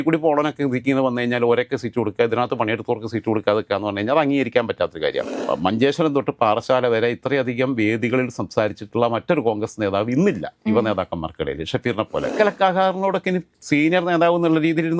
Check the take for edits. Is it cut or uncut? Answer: cut